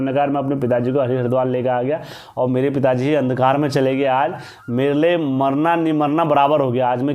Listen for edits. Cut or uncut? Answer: uncut